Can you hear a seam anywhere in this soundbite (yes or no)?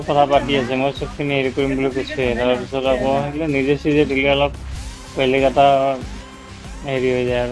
no